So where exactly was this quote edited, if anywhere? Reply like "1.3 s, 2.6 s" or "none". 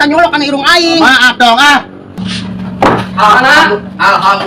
2.2 s